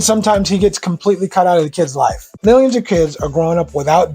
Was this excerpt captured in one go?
no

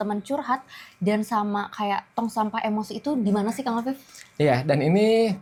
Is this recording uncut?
yes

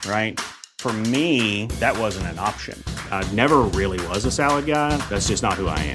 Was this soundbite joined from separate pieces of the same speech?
no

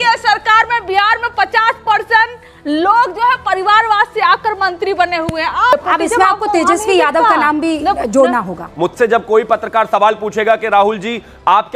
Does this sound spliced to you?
yes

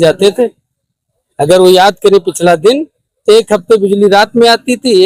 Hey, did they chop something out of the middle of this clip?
no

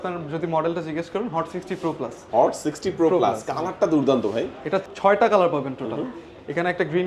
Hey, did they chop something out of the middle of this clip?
yes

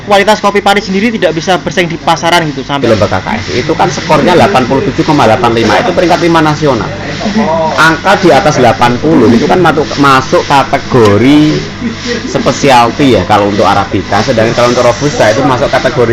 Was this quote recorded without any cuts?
no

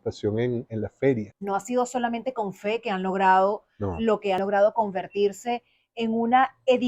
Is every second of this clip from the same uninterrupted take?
no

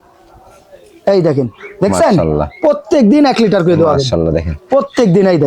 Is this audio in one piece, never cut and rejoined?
yes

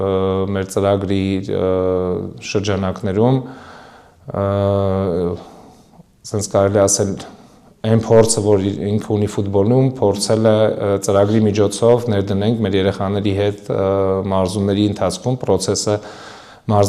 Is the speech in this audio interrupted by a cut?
no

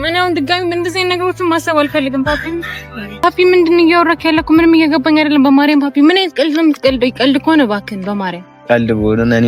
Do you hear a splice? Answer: no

